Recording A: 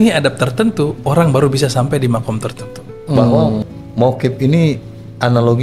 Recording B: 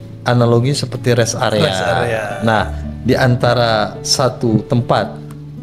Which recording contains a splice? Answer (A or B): A